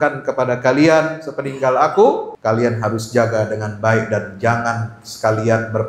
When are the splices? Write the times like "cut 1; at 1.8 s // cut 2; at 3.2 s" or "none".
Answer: cut 1; at 2.3 s